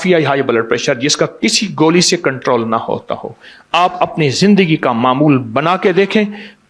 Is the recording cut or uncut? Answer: uncut